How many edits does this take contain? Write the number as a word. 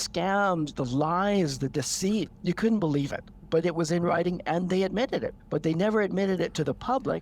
two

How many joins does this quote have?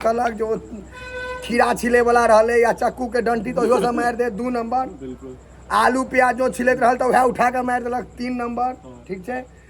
zero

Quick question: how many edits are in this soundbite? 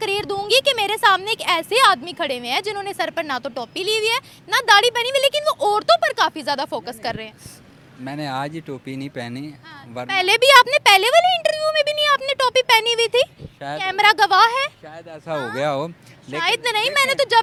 zero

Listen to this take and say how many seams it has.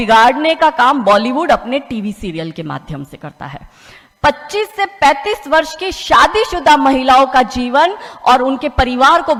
zero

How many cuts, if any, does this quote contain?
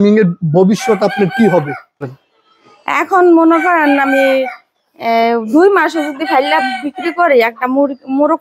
one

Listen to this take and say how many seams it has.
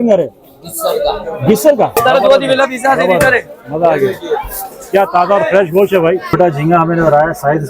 two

